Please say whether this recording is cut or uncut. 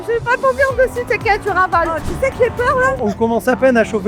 cut